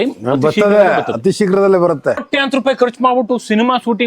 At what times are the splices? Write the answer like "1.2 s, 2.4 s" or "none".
2.3 s

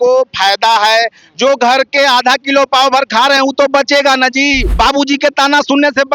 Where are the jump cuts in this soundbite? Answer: 4.6 s

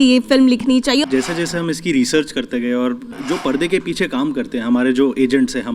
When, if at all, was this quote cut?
1.0 s, 3.2 s

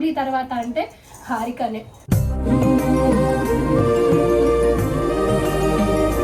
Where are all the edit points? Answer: none

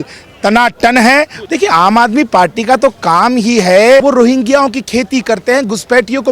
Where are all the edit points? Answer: 1.4 s, 4.0 s

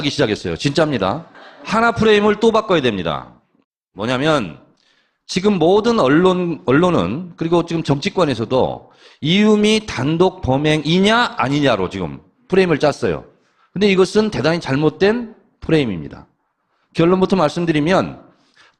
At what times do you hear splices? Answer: 12.7 s

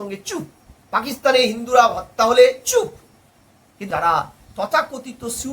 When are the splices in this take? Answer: 3.8 s

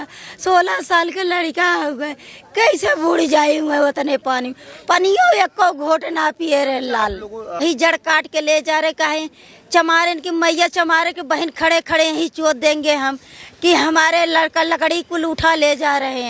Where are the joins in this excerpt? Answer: 7.6 s

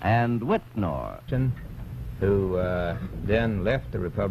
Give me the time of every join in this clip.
none

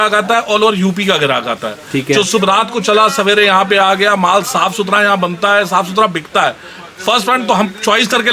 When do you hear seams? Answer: none

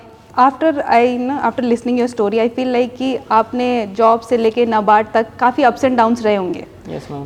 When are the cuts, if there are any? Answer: none

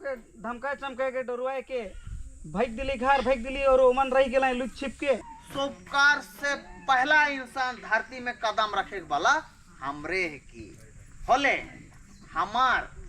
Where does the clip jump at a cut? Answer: 5.4 s

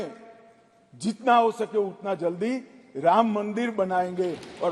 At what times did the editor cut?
none

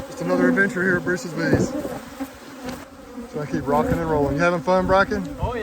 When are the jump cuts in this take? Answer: 2.9 s

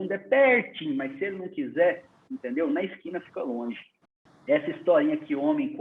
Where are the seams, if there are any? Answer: 4.2 s

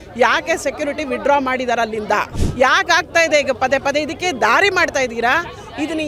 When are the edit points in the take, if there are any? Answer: 2.4 s

